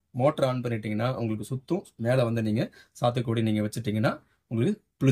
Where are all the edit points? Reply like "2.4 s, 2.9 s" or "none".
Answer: none